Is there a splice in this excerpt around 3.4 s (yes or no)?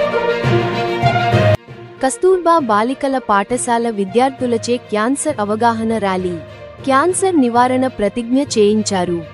no